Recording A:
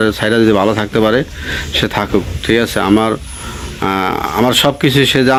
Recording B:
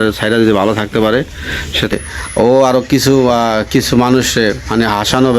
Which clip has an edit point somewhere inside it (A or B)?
B